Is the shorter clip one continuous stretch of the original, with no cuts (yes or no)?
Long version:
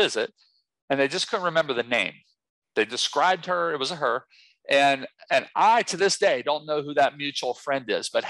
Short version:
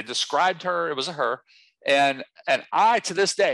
yes